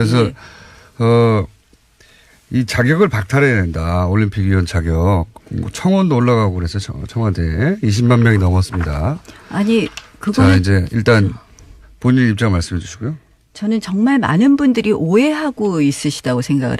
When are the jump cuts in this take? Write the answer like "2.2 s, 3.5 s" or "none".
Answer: 4.8 s